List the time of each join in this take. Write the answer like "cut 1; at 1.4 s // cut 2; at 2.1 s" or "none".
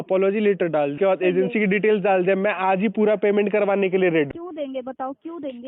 cut 1; at 1.0 s // cut 2; at 4.3 s